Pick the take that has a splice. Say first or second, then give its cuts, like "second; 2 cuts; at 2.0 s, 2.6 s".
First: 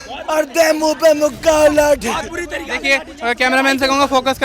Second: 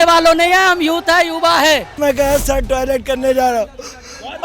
second; 1 cut; at 2.0 s